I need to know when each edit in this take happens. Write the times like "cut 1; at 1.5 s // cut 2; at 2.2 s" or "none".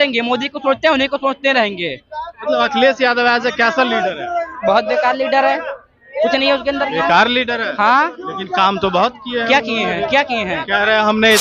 none